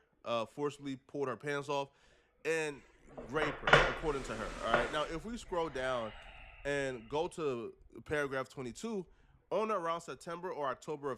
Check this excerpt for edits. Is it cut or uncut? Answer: uncut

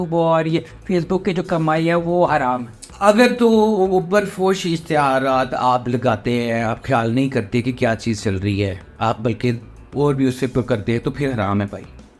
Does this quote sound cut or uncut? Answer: uncut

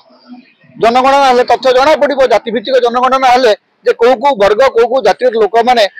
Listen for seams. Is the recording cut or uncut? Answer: uncut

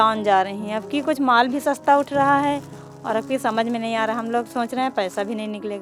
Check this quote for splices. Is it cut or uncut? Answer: uncut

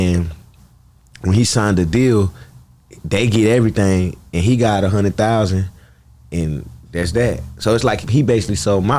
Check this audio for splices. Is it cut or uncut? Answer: uncut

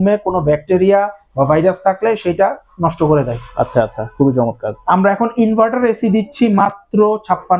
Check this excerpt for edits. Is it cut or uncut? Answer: uncut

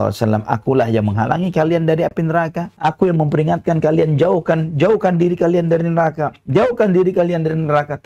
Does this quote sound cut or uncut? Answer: uncut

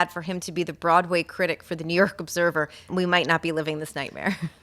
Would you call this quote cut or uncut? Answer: cut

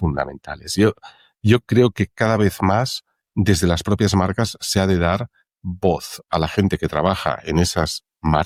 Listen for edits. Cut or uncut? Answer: uncut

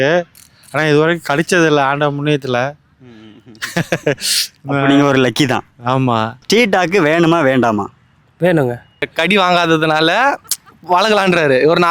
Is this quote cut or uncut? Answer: cut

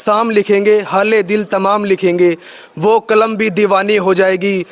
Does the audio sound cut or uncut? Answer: uncut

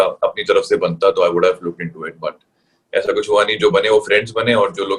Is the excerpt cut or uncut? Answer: uncut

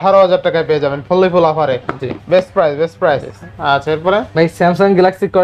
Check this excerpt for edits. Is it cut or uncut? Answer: uncut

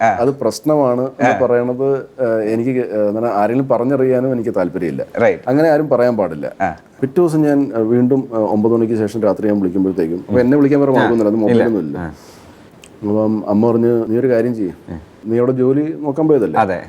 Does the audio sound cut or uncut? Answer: cut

